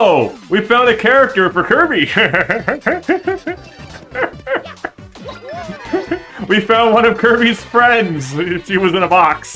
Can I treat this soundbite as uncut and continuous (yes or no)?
yes